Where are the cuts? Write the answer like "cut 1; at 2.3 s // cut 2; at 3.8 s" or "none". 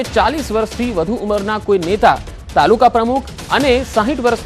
cut 1; at 2.0 s